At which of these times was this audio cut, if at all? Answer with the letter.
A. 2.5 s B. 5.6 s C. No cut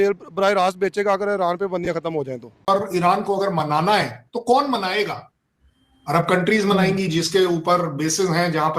A